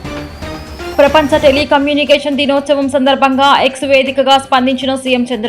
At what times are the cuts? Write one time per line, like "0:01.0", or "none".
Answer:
0:00.9